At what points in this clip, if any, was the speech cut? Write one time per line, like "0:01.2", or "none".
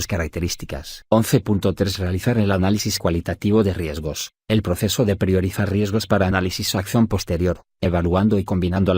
0:00.9
0:04.6